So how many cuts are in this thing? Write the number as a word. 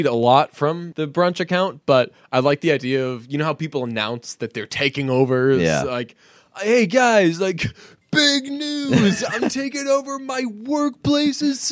one